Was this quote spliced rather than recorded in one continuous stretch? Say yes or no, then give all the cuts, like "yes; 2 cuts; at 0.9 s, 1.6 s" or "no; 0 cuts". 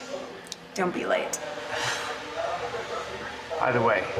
yes; 1 cut; at 1.9 s